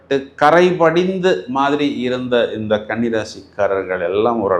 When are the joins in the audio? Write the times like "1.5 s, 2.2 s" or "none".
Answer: none